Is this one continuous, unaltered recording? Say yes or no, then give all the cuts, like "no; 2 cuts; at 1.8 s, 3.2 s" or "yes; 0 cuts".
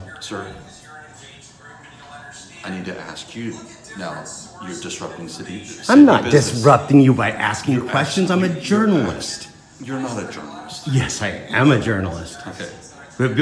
yes; 0 cuts